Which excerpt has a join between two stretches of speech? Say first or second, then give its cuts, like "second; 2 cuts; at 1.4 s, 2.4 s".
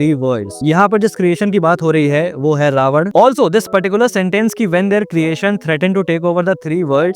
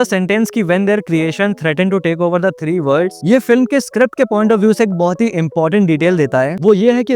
first; 1 cut; at 3.1 s